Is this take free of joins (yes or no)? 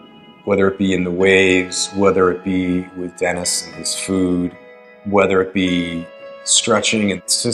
yes